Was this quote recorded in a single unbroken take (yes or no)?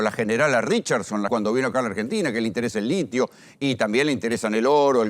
no